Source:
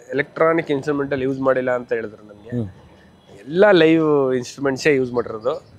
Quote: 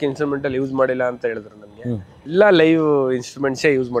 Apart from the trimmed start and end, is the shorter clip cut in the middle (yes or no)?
yes